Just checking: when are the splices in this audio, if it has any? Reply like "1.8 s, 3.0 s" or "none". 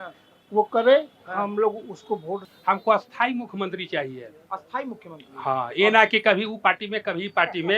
2.4 s